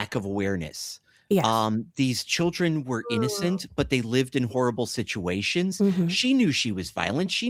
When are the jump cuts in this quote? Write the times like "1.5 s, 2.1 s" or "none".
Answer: none